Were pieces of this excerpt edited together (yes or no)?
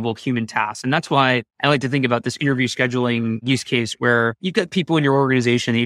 yes